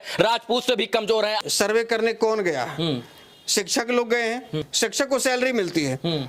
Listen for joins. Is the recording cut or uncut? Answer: cut